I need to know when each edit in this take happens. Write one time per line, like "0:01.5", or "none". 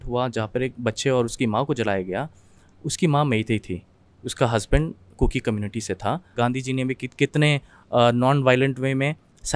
0:06.4